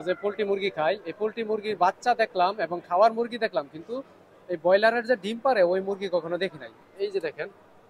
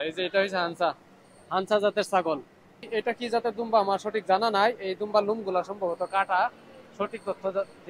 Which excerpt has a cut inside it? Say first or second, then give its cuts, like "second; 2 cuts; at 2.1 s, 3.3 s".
second; 1 cut; at 2.8 s